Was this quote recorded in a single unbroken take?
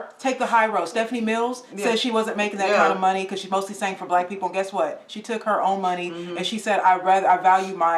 yes; 0 cuts

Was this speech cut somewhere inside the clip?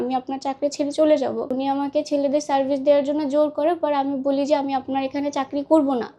yes; 1 cut; at 1.5 s

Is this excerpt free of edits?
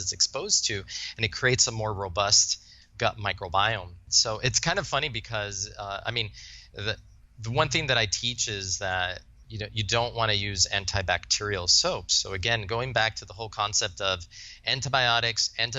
no; 1 cut; at 4.1 s

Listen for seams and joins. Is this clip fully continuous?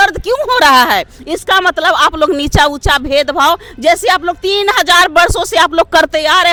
yes; 0 cuts

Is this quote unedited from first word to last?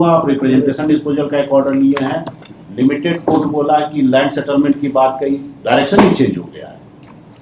yes; 0 cuts

